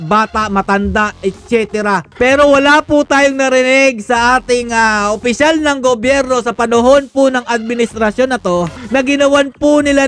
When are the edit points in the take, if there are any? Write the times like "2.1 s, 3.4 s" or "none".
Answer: 2.1 s, 8.8 s